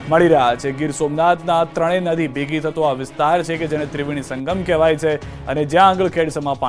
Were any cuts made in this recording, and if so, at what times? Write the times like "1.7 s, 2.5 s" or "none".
2.7 s